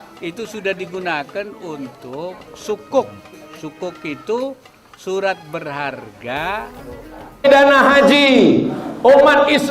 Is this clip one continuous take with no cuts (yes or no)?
no